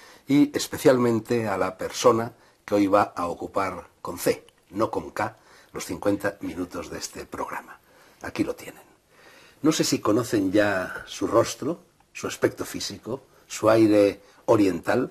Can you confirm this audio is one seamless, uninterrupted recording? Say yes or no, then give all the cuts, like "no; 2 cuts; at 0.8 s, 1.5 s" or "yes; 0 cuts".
yes; 0 cuts